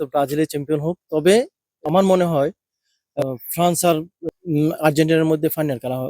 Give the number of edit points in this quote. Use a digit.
3